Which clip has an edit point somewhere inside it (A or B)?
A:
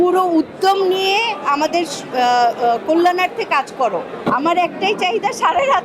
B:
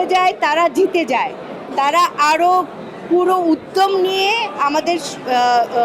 A